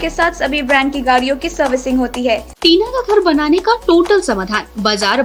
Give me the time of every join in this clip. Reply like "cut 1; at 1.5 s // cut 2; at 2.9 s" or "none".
cut 1; at 2.5 s